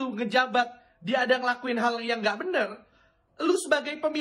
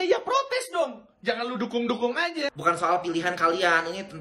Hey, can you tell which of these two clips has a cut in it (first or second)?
second